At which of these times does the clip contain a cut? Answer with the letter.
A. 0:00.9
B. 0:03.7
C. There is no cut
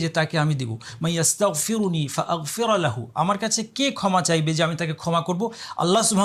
C